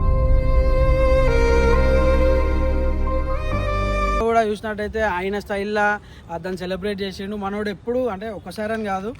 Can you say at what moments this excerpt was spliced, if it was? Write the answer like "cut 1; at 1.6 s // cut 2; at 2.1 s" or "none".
cut 1; at 4.2 s

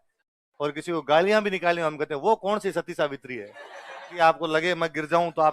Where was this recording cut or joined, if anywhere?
cut 1; at 4.1 s

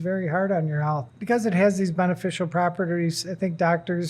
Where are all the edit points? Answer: cut 1; at 1.1 s

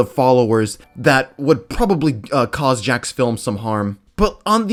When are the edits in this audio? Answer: none

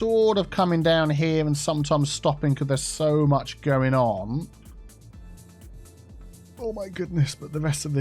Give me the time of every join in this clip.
none

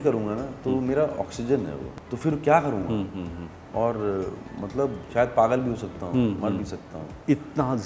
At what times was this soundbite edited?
cut 1; at 1.8 s // cut 2; at 3.6 s // cut 3; at 5.0 s

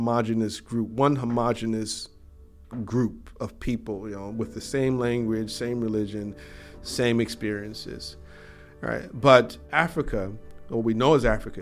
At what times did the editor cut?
none

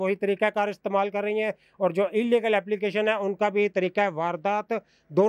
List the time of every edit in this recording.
none

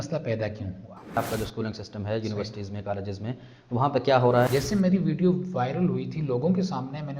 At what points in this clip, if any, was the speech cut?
cut 1; at 1.2 s // cut 2; at 4.5 s

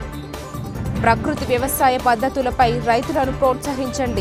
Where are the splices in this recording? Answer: none

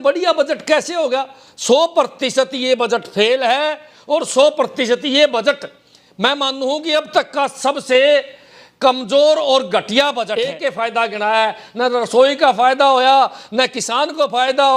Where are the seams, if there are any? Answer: cut 1; at 10.4 s

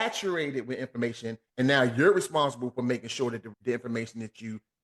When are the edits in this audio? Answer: cut 1; at 3.5 s

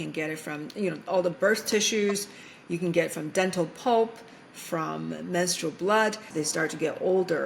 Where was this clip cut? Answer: cut 1; at 6.2 s

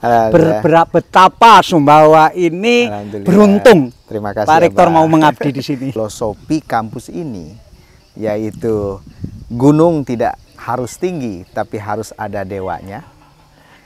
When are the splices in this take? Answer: cut 1; at 5.9 s

